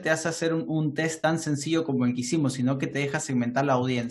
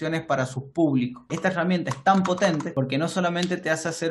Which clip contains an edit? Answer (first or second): second